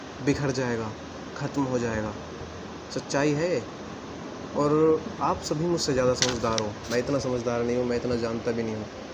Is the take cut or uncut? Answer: uncut